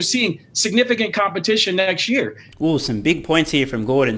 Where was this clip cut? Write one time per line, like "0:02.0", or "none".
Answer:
none